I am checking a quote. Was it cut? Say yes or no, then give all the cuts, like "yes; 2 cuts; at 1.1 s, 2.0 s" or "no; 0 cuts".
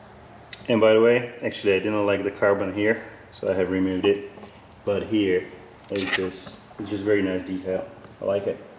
no; 0 cuts